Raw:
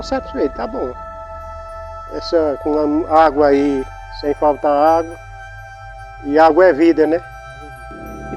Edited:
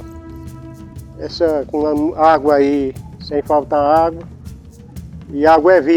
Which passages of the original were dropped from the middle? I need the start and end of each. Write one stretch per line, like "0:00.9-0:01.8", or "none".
none